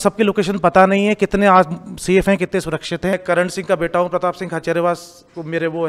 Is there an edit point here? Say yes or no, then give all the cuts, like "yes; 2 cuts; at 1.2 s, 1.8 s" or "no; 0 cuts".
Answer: yes; 1 cut; at 3.1 s